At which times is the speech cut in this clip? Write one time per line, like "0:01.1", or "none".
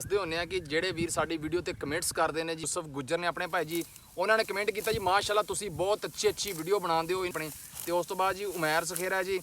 0:02.6
0:07.4